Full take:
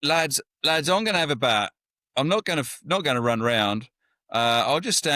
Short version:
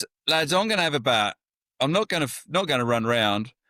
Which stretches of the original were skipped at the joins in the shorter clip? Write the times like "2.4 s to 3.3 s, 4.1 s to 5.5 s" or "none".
none